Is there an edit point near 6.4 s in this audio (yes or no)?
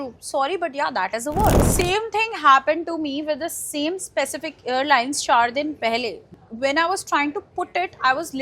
yes